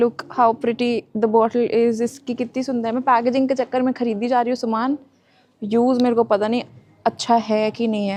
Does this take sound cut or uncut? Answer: uncut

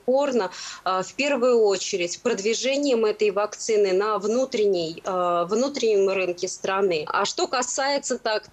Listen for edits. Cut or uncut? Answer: cut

